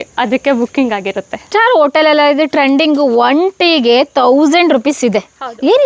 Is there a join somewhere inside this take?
yes; 1 cut; at 1.4 s

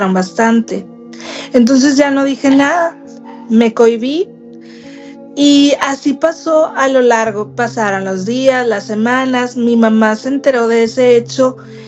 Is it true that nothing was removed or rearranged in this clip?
yes; 0 cuts

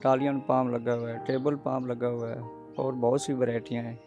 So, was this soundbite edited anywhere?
no; 0 cuts

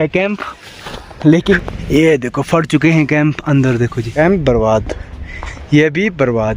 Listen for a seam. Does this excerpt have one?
yes; 2 cuts; at 1.6 s, 4.0 s

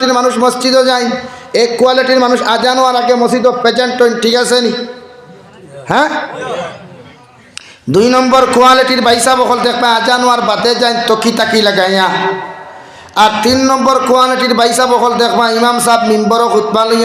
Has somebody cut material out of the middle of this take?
no; 0 cuts

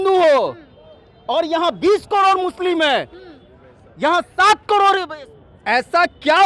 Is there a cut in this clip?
yes; 1 cut; at 5.2 s

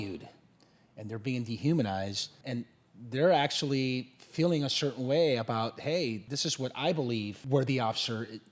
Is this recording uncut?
no; 3 cuts; at 2.4 s, 6.2 s, 7.4 s

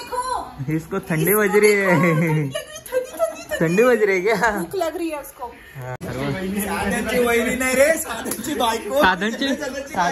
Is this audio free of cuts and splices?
no; 1 cut; at 6.0 s

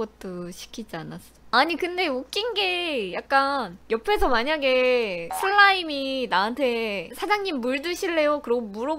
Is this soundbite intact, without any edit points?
no; 1 cut; at 1.5 s

